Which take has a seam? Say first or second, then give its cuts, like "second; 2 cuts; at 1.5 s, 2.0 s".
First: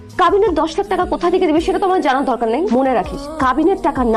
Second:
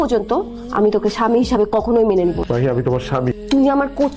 second; 2 cuts; at 2.4 s, 3.4 s